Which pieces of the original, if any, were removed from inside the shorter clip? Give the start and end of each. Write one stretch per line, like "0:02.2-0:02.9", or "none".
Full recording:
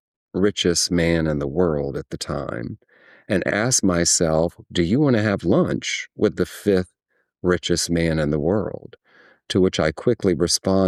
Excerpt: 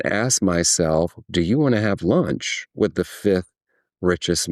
none